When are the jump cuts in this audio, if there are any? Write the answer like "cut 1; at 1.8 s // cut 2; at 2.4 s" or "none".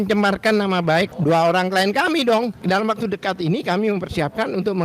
cut 1; at 1.1 s // cut 2; at 2.6 s